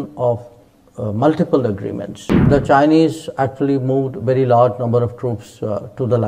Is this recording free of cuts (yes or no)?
no